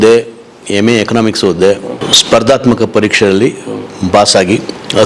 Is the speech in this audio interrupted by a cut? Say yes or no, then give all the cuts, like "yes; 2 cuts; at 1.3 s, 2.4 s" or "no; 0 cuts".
yes; 1 cut; at 2.1 s